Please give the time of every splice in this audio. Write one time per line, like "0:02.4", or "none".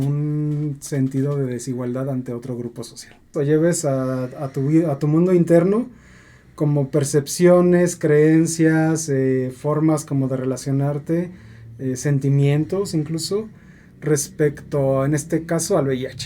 0:03.3